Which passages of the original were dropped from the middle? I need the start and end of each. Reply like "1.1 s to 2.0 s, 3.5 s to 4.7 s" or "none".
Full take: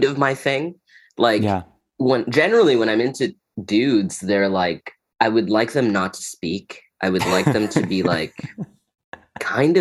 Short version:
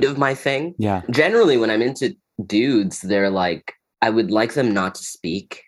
1.1 s to 2.3 s